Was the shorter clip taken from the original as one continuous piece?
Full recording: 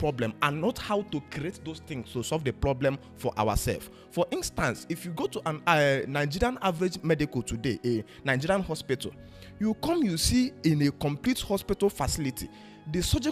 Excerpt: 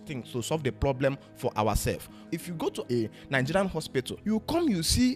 no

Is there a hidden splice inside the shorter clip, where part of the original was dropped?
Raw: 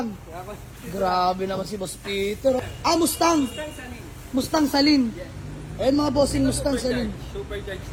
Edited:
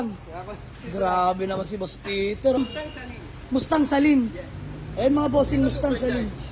yes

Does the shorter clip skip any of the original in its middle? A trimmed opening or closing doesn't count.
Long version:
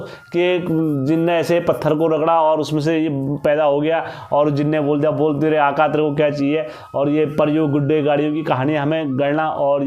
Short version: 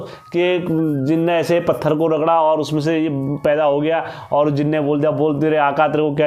no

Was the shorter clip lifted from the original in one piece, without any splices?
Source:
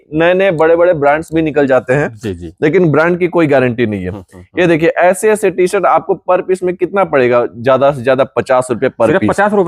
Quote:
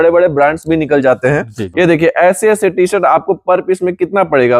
no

